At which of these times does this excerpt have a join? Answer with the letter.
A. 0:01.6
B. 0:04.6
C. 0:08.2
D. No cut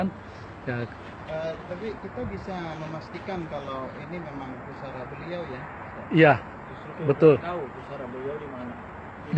D